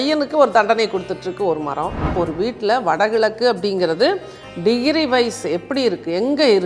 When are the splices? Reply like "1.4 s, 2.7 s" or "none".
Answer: 2.1 s